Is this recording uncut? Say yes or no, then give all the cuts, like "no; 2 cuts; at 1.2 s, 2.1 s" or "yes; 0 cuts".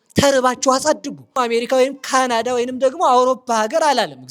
no; 1 cut; at 1.4 s